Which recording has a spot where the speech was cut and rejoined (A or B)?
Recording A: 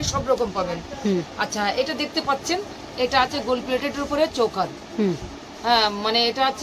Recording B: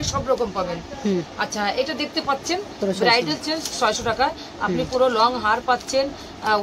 B